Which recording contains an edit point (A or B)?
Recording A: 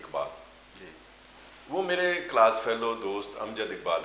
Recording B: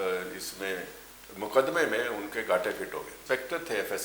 B